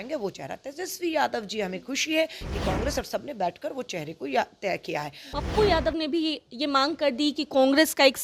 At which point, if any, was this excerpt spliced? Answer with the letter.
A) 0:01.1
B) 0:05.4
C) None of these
B